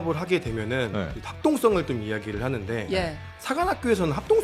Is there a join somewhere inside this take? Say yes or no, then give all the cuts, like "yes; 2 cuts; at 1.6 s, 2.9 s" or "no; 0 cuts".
no; 0 cuts